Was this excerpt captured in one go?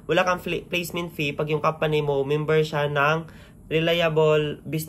yes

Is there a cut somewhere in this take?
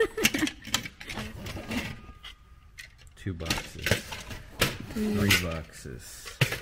yes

